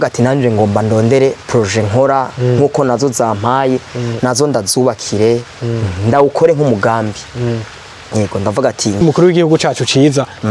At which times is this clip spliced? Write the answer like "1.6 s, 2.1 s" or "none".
9.0 s